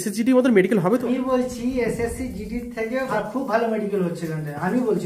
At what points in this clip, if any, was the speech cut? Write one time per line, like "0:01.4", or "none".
0:01.0
0:03.1